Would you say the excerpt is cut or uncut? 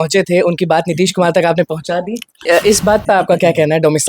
cut